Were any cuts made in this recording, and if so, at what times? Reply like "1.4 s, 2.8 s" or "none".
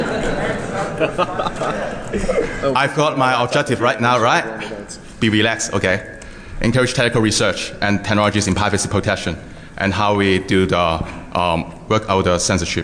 4.1 s